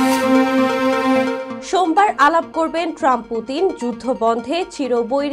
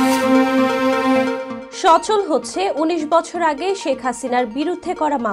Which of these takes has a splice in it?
first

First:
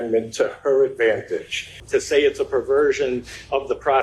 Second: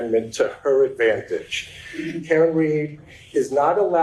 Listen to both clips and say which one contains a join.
first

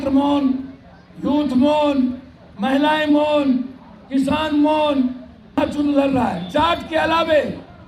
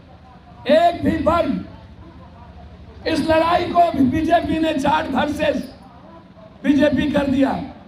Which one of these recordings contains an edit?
first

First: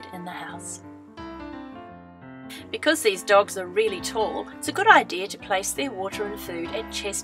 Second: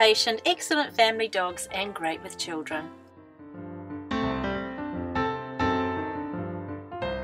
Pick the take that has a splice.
second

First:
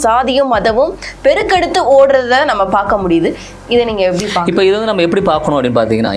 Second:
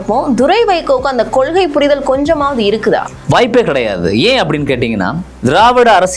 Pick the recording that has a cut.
second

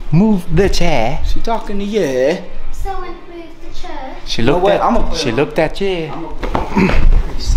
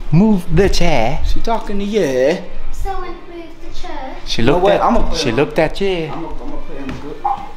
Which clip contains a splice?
first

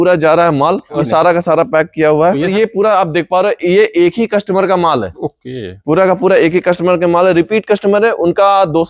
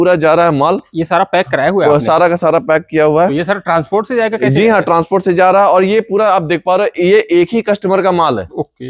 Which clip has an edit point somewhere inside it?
first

